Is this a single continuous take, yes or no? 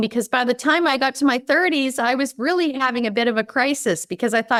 yes